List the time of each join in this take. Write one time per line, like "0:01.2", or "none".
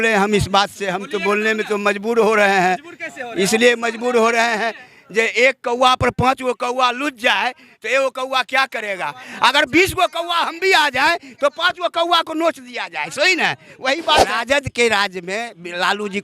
0:14.3